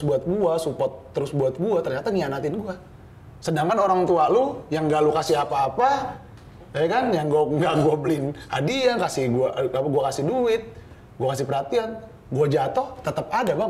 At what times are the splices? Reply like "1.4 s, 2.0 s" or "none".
none